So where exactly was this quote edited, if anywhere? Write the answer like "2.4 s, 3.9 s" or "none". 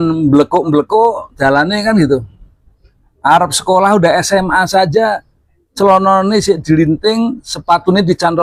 none